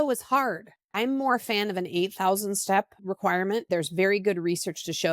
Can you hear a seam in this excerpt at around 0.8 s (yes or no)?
yes